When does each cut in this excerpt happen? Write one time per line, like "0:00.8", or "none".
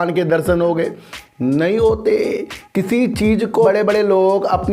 0:03.5